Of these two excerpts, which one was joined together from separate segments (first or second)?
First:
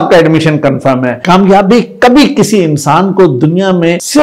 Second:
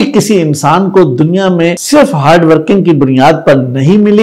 first